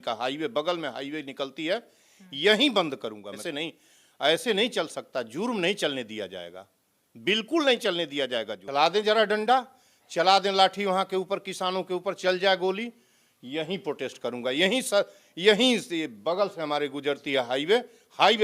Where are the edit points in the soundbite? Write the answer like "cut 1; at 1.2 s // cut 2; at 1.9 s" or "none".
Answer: cut 1; at 3.4 s // cut 2; at 8.6 s